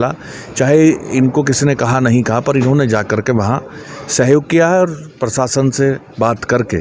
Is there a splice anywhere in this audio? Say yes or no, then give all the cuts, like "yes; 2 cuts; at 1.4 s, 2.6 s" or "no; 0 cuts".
no; 0 cuts